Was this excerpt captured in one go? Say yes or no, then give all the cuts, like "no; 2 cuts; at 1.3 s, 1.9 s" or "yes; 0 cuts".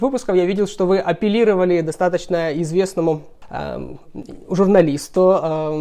yes; 0 cuts